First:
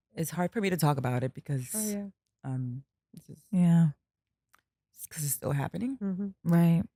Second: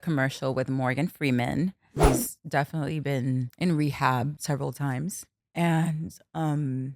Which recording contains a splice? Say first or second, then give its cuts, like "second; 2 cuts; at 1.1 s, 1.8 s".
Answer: second; 4 cuts; at 2.0 s, 3.5 s, 4.4 s, 5.3 s